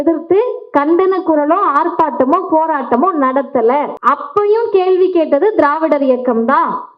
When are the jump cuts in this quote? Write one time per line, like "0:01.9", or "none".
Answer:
0:03.9